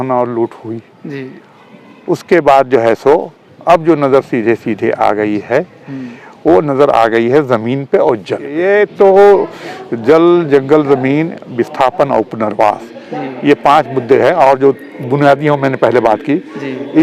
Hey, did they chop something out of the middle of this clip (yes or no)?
yes